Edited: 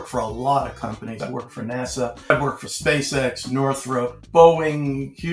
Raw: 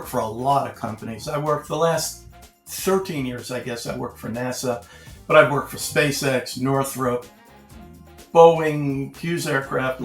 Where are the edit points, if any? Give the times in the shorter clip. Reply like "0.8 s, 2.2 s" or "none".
1.2 s, 2.3 s, 4.2 s